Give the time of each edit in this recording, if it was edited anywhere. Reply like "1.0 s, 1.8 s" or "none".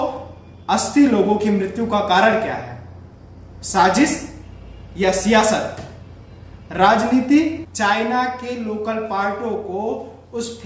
7.7 s